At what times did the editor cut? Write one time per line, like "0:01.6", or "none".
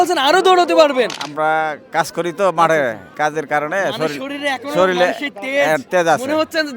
0:01.2
0:03.1